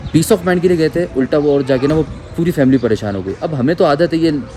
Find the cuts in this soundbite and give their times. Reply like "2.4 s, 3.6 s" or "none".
none

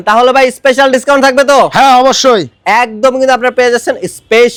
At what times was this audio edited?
none

